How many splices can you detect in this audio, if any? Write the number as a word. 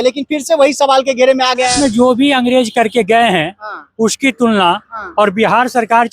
one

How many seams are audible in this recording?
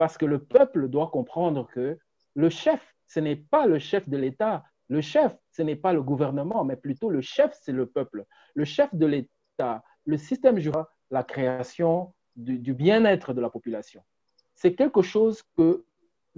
one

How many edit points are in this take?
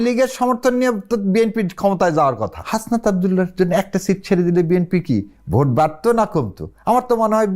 one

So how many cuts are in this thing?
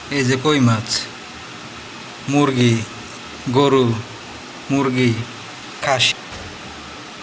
one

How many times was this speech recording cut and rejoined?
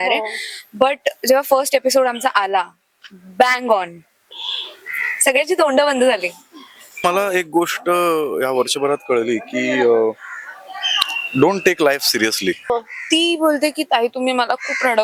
two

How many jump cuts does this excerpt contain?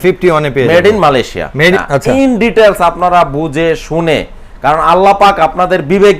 one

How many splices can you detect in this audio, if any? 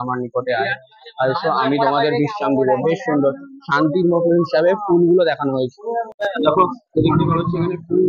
zero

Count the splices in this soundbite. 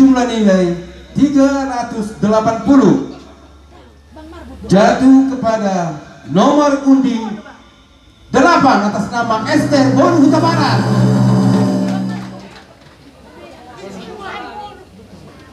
one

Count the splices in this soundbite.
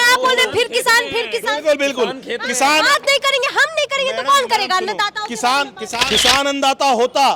one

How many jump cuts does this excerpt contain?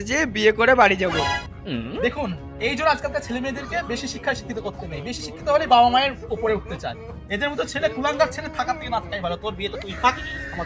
one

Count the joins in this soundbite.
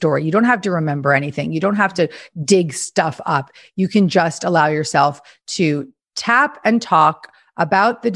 zero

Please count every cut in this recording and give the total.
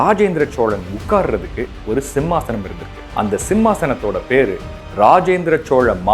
one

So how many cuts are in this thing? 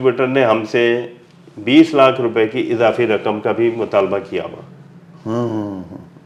zero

